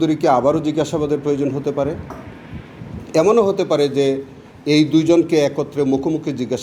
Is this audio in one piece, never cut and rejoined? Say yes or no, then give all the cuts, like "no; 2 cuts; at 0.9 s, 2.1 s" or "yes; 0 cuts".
yes; 0 cuts